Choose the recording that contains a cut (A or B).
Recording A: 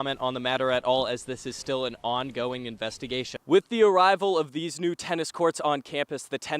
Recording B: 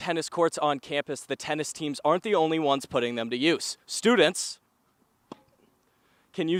A